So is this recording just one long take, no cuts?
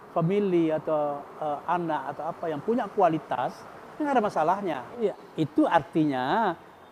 no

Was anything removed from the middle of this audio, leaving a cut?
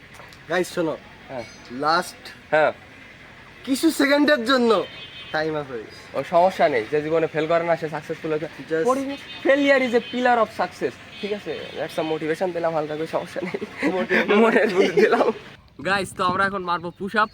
yes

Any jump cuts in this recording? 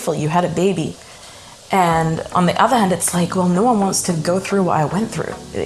no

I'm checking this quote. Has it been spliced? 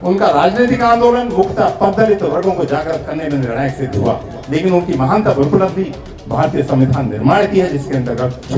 no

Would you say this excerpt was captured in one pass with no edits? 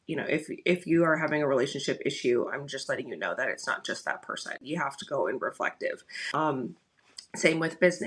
no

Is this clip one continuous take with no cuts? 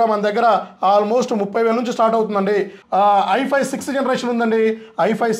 no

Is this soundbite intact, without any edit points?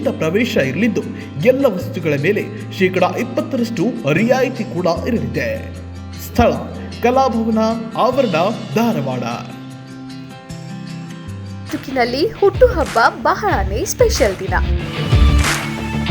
no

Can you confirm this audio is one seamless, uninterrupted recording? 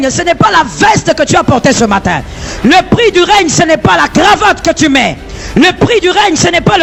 yes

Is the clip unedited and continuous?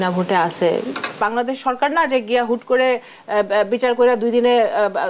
no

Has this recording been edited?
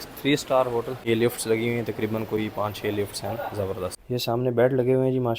yes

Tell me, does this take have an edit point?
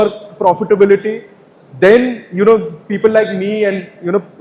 no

